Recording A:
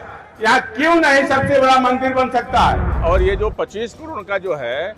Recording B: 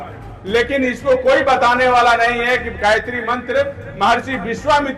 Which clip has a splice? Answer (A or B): A